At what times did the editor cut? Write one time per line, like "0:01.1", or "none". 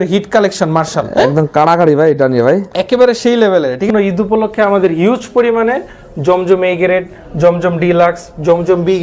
0:03.9